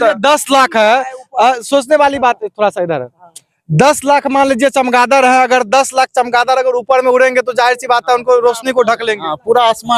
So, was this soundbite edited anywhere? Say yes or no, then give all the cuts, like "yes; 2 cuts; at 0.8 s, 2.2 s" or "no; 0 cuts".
no; 0 cuts